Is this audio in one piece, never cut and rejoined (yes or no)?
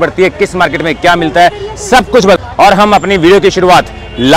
no